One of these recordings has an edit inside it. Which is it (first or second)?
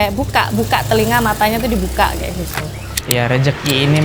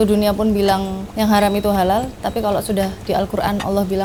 first